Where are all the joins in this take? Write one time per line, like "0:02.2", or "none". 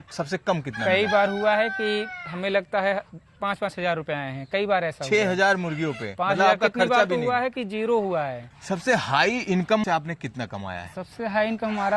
0:08.5
0:09.8